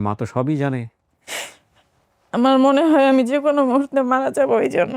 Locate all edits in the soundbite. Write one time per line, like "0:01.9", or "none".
0:00.9